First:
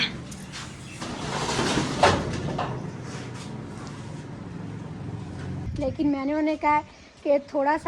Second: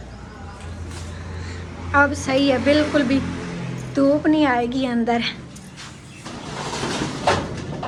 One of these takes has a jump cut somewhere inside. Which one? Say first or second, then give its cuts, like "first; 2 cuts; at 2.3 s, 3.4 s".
first; 1 cut; at 5.6 s